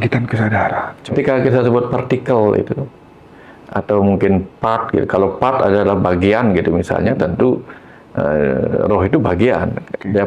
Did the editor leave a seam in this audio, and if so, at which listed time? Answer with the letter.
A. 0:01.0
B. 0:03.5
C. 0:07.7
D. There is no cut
A